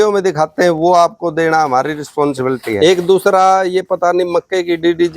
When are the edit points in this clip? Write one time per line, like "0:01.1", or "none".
0:02.7